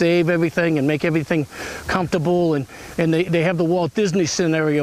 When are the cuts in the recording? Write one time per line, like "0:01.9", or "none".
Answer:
none